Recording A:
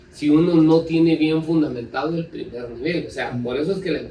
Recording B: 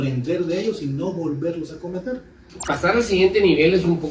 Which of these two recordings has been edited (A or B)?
B